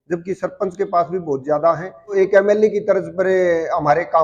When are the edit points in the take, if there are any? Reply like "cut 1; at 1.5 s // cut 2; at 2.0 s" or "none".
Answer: cut 1; at 2.1 s